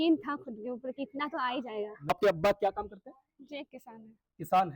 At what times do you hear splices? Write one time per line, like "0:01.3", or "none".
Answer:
0:02.1